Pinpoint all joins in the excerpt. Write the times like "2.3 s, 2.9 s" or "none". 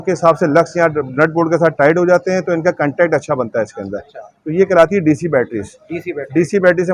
none